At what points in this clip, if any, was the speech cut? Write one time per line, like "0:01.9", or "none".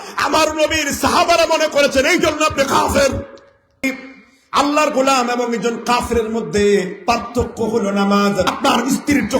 0:03.8
0:08.5